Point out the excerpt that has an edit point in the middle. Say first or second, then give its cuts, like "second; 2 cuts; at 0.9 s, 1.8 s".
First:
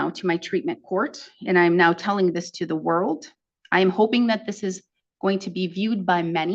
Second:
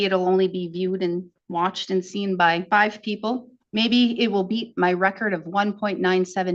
second; 2 cuts; at 2.6 s, 3.6 s